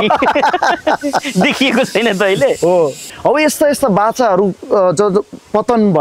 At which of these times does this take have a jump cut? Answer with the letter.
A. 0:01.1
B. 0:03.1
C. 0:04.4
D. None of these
B